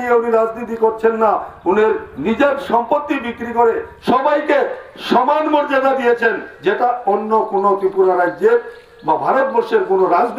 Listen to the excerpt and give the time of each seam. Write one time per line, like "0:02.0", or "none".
0:03.9